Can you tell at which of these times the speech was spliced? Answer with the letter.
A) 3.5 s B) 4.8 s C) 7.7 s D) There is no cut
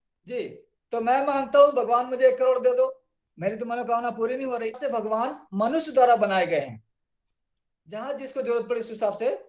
B